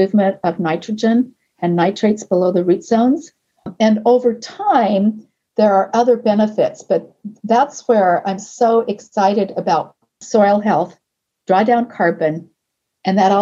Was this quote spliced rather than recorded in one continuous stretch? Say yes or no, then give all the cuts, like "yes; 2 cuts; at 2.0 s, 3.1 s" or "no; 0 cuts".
yes; 2 cuts; at 3.7 s, 10.2 s